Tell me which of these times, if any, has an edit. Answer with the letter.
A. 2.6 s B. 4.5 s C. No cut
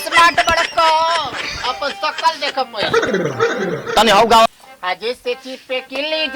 B